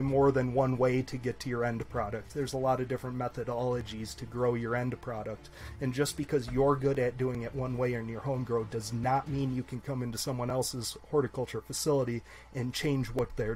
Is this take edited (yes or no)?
no